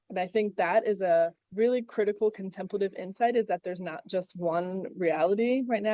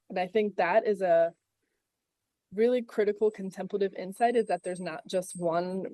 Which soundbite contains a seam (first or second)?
first